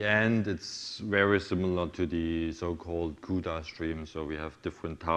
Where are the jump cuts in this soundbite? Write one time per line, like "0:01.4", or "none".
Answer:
none

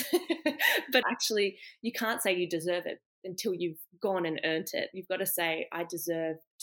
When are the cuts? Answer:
0:01.0

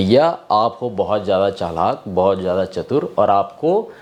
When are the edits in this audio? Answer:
none

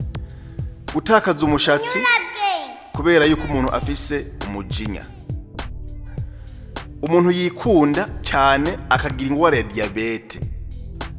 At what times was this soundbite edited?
0:00.9

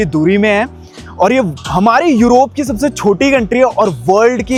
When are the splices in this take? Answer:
none

